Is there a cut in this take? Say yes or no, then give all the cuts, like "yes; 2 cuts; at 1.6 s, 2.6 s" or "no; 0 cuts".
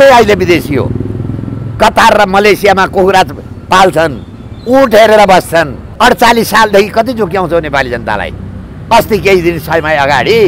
yes; 1 cut; at 5.9 s